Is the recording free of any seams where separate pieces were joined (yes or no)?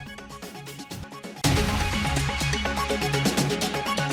no